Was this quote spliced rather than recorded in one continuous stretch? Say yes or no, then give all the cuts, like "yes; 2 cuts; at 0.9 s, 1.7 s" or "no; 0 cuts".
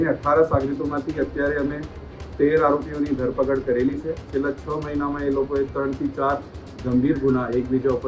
yes; 1 cut; at 4.3 s